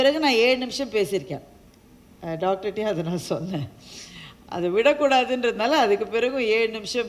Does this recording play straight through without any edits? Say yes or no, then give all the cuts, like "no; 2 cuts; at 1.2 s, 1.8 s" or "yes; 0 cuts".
yes; 0 cuts